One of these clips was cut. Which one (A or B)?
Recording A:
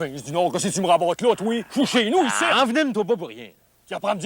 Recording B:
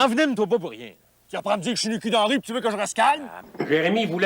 B